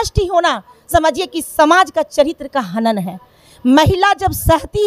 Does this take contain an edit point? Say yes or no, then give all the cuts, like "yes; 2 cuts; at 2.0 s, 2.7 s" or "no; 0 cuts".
no; 0 cuts